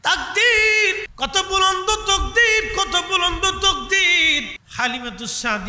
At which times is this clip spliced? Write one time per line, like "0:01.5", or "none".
0:01.1
0:04.6